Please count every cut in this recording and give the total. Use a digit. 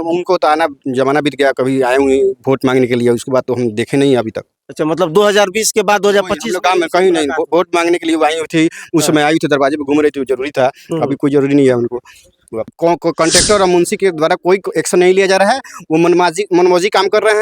1